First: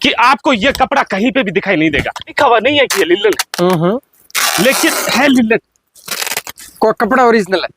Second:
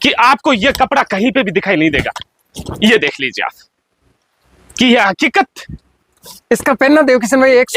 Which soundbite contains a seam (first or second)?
first